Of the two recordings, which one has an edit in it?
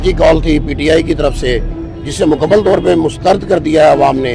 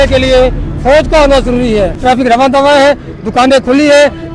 second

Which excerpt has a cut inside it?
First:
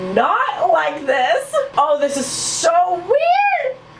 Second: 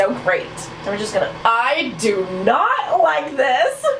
second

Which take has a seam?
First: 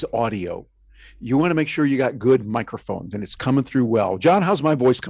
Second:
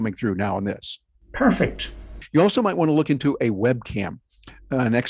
second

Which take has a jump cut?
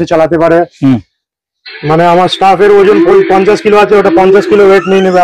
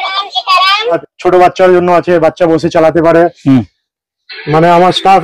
second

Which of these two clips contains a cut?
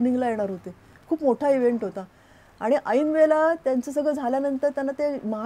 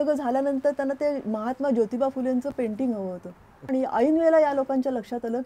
second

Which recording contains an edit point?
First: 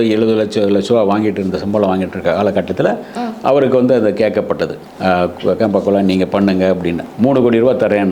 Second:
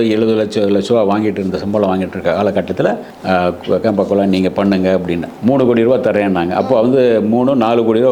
second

